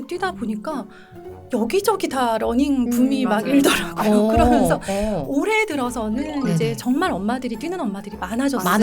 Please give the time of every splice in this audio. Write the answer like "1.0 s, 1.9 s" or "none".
none